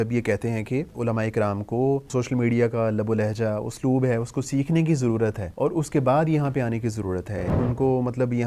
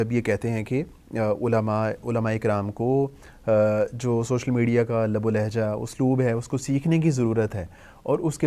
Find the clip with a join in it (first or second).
first